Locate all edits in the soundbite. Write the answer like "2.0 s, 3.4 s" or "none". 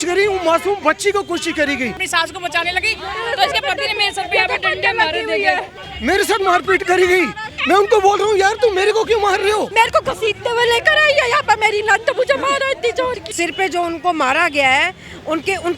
2.0 s, 5.8 s, 9.7 s, 13.3 s